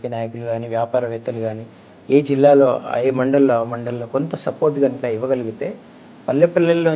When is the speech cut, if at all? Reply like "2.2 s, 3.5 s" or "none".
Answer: none